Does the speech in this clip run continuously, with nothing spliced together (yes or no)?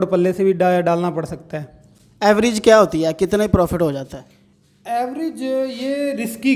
yes